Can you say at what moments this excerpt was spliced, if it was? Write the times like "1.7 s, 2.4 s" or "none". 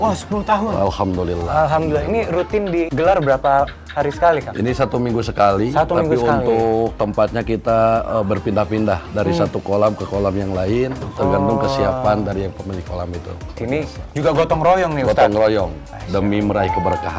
2.9 s, 13.5 s, 15.8 s